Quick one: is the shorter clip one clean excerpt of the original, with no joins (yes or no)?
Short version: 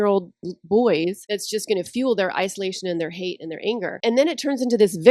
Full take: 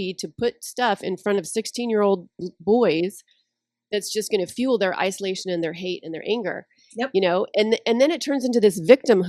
no